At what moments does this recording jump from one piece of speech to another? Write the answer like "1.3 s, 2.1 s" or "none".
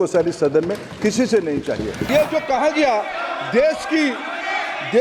2.0 s